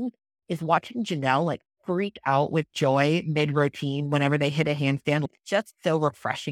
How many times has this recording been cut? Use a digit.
1